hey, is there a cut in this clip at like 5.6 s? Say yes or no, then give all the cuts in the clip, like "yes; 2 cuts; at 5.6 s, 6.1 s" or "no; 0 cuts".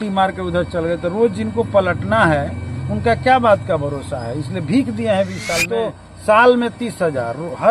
yes; 1 cut; at 5.6 s